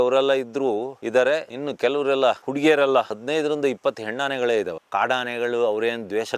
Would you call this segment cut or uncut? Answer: cut